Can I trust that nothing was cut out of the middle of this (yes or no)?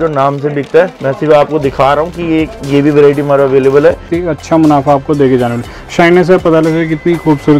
no